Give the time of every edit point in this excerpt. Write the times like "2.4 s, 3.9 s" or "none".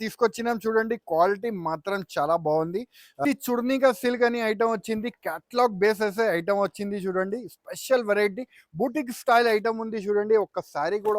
3.1 s